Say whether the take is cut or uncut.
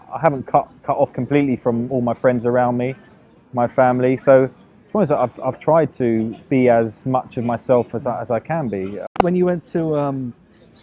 cut